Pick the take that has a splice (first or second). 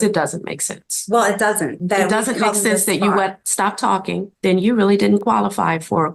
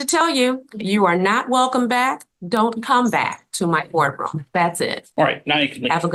first